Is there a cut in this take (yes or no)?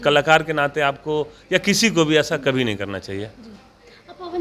no